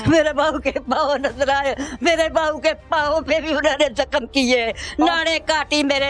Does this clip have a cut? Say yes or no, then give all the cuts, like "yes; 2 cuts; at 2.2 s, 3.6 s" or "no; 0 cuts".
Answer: no; 0 cuts